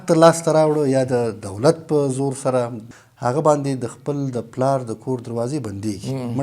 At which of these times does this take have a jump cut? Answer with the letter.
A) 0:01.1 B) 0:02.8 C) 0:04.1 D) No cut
B